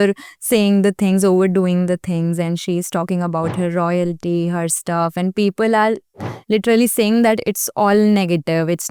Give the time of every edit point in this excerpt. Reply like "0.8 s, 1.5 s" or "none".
none